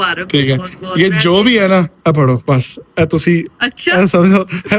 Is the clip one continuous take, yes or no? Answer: yes